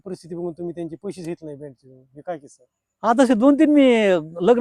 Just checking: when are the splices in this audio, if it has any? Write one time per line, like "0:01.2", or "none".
none